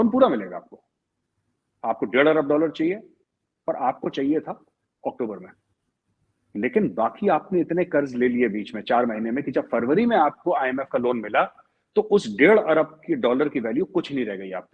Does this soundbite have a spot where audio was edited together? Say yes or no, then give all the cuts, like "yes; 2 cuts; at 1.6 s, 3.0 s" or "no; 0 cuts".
no; 0 cuts